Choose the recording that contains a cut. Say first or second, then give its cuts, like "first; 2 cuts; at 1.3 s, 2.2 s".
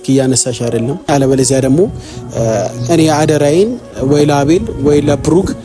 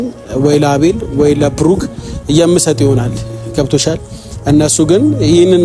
first; 1 cut; at 1.1 s